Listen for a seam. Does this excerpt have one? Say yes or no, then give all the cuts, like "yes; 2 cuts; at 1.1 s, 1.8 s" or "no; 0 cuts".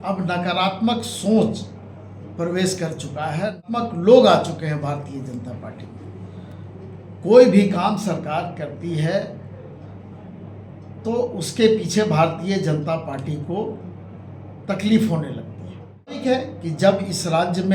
yes; 2 cuts; at 3.6 s, 16.2 s